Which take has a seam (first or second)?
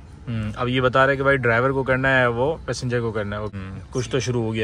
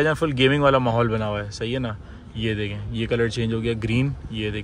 first